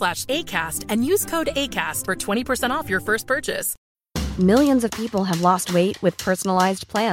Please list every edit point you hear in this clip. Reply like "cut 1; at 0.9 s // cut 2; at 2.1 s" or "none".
cut 1; at 3.7 s